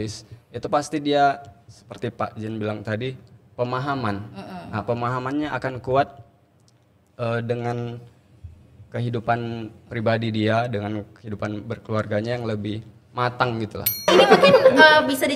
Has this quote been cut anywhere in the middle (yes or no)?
yes